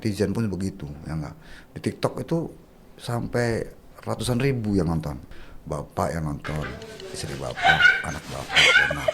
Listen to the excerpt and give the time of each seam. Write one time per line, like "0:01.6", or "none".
0:07.6